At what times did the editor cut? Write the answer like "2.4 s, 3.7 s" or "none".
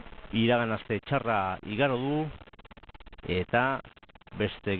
2.2 s

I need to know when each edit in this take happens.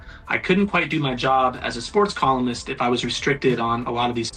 none

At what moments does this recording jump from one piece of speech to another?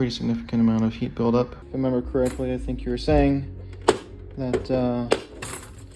1.6 s

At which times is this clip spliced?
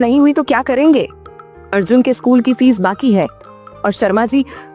none

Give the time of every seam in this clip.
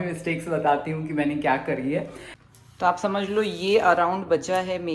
2.3 s

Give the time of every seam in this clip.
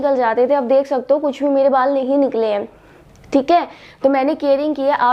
none

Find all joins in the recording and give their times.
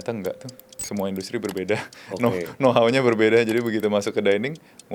none

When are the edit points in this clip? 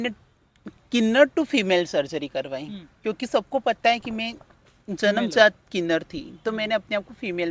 none

